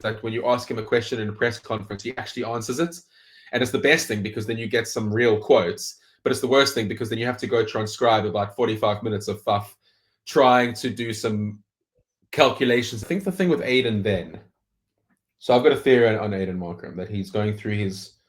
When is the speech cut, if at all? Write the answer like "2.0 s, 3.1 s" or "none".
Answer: 13.0 s